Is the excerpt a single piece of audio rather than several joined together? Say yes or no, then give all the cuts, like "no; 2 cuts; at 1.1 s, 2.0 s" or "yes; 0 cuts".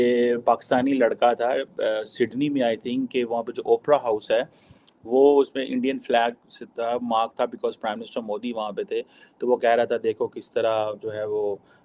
yes; 0 cuts